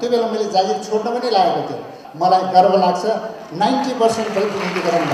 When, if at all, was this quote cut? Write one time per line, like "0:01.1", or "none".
0:02.0